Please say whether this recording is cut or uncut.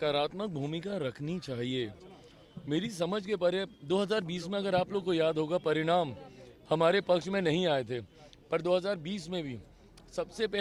uncut